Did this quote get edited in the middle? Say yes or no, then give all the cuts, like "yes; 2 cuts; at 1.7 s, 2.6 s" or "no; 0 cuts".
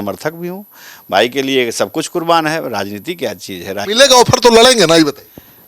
yes; 1 cut; at 3.8 s